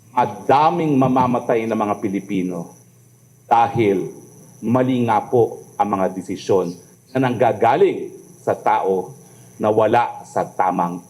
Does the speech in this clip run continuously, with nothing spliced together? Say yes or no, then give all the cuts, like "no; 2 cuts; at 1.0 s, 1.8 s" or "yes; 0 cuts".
yes; 0 cuts